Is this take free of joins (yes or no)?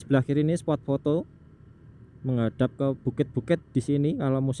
no